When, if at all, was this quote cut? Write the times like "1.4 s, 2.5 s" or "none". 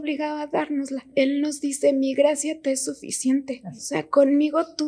1.1 s, 3.7 s